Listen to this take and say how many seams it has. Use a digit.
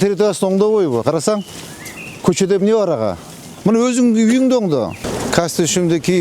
1